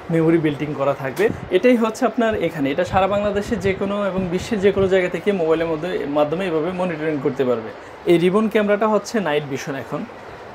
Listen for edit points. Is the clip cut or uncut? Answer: cut